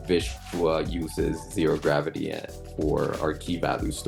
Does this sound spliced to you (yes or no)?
no